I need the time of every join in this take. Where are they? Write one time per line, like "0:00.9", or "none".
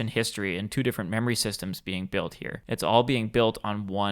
0:02.5